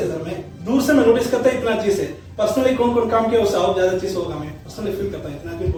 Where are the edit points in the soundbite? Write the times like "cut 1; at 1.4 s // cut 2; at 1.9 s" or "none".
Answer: none